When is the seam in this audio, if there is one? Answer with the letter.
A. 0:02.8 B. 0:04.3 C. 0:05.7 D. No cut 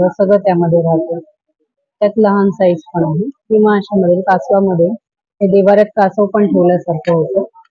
D